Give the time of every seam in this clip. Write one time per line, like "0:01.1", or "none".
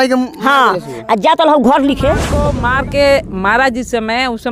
0:02.5